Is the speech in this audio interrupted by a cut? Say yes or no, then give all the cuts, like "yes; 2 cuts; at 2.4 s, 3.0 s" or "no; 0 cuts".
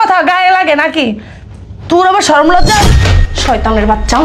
yes; 1 cut; at 2.9 s